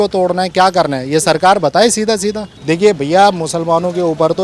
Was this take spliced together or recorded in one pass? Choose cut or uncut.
cut